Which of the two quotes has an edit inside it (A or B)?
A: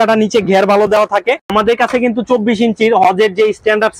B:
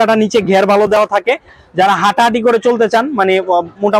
A